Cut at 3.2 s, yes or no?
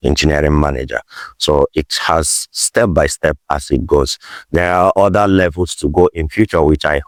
no